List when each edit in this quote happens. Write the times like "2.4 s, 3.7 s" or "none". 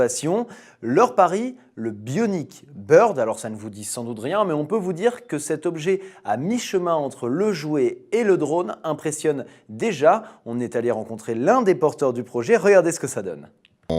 1.1 s